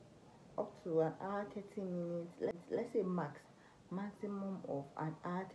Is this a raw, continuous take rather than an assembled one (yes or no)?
yes